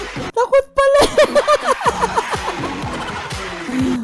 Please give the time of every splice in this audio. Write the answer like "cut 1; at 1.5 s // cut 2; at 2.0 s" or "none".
none